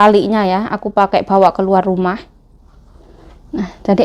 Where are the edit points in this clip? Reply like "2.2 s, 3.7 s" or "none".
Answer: none